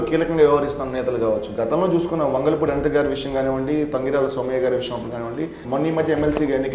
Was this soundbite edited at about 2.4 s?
no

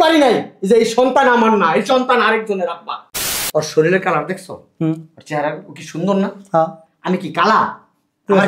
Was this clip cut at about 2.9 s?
yes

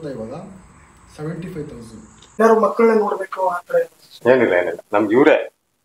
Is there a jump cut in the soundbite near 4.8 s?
no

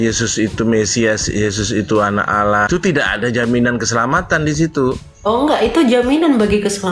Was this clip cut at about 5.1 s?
no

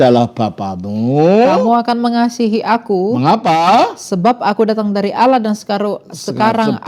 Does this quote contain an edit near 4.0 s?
no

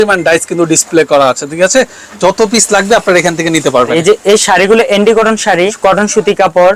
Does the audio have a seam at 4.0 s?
yes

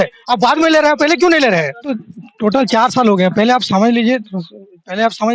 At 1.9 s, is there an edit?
yes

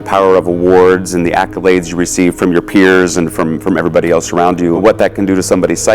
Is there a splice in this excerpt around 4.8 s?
yes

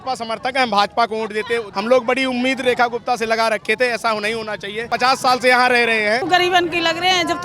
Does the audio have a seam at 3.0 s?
no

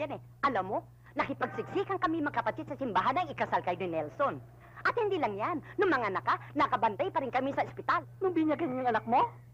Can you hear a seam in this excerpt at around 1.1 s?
no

